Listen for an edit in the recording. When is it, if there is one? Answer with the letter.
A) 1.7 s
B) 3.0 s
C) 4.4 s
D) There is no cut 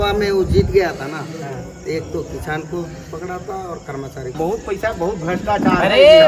C